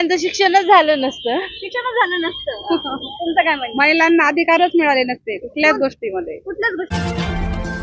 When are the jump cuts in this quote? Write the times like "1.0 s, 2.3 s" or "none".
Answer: 6.9 s

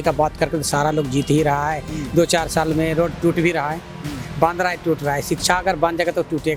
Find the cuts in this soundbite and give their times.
none

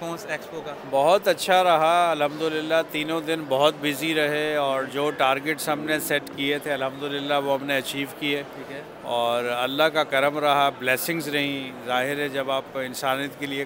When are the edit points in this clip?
none

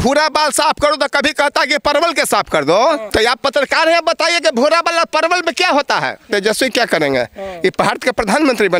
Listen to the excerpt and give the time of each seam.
3.0 s, 6.3 s

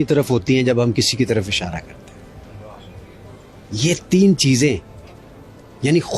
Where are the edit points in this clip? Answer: none

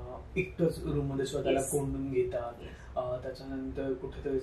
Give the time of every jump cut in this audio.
none

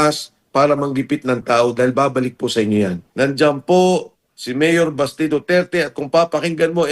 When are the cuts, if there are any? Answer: 3.0 s

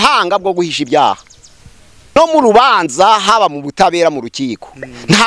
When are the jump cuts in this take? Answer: 2.2 s

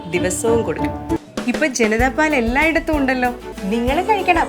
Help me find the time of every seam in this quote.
1.2 s, 3.5 s

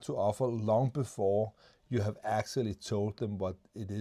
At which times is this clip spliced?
none

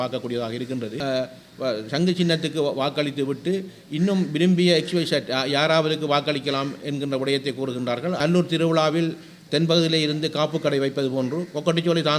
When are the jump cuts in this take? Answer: 1.0 s, 8.2 s

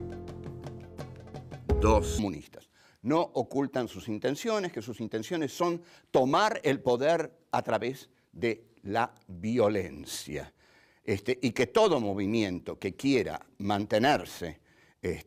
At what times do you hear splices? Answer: none

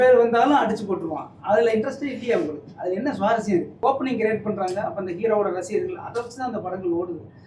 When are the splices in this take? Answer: 3.8 s

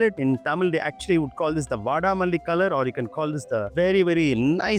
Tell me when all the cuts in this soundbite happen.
none

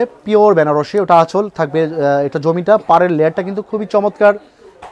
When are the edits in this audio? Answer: none

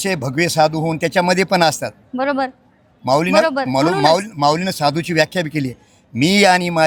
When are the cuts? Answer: none

